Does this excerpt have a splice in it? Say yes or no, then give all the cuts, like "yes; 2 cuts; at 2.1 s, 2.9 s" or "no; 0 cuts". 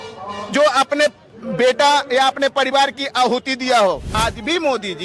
yes; 1 cut; at 4.1 s